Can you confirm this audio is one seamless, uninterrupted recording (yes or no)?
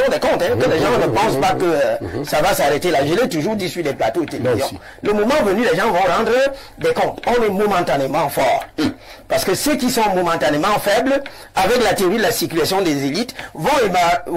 yes